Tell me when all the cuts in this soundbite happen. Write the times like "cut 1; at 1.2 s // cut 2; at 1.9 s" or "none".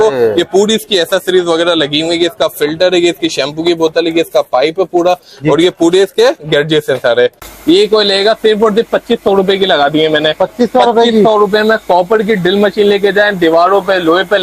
cut 1; at 7.5 s